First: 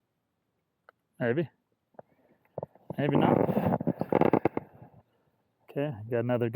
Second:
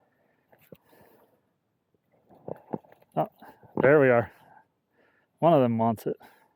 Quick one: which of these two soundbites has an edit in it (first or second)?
first